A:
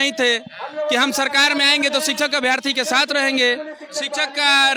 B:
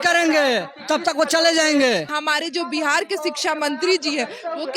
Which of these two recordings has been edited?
B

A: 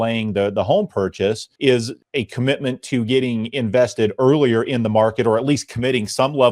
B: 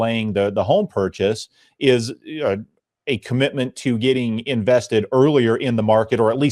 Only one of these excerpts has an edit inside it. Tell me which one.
A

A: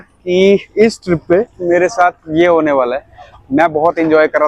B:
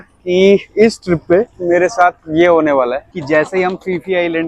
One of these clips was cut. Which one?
B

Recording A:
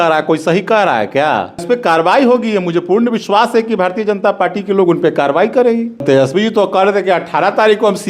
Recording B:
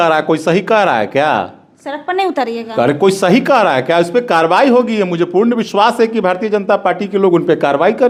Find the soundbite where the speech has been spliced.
A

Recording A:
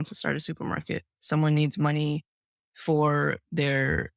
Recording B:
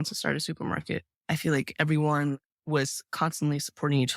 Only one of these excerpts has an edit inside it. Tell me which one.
B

